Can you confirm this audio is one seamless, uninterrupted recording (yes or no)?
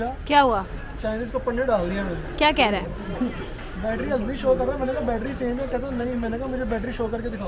yes